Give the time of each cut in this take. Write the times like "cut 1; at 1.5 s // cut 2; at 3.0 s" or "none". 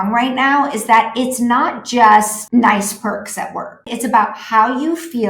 cut 1; at 2.4 s // cut 2; at 3.9 s